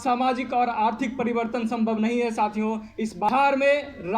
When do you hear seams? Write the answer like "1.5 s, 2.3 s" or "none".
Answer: 3.3 s

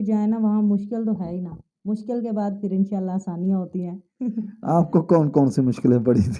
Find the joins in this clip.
none

